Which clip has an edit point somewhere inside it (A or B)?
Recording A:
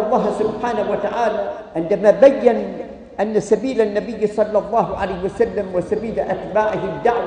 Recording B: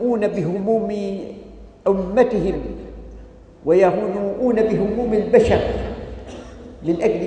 A